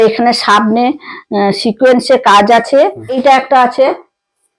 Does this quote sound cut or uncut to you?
cut